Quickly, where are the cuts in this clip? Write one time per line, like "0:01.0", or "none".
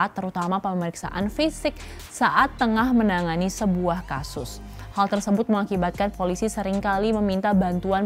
none